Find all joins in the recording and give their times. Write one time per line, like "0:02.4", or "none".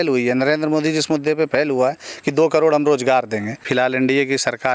0:03.7